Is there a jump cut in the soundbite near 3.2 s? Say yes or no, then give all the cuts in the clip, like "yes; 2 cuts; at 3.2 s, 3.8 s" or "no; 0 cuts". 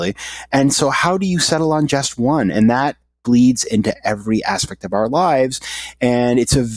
no; 0 cuts